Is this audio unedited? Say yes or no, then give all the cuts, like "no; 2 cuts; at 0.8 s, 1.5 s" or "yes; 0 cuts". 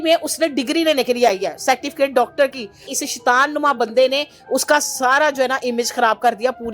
no; 1 cut; at 2.9 s